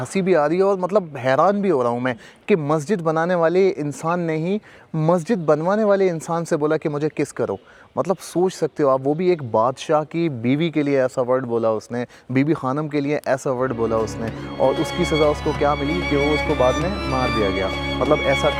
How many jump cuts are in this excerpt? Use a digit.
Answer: 0